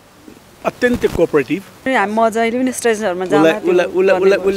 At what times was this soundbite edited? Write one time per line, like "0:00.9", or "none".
0:01.9